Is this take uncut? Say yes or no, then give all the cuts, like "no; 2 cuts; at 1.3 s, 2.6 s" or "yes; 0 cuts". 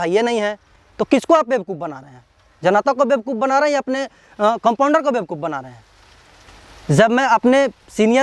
yes; 0 cuts